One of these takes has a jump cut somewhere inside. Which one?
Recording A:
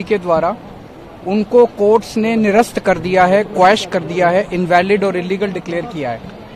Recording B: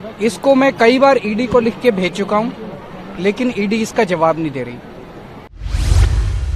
B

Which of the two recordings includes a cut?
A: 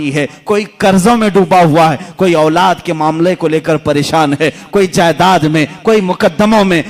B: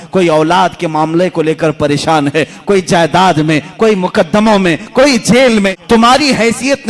B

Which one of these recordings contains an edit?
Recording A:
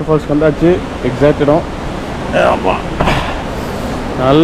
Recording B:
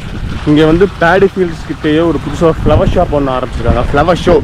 A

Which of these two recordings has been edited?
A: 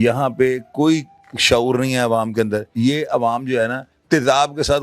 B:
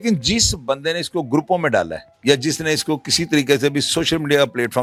A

